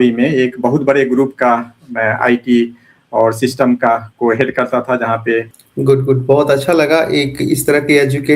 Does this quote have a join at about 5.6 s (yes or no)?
yes